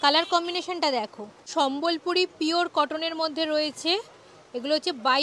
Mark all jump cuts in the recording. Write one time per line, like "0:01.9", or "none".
0:01.5